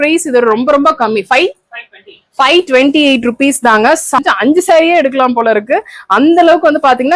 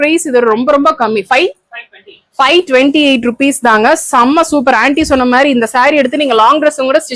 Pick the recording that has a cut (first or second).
first